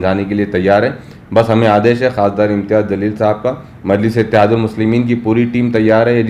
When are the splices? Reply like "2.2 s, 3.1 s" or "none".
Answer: none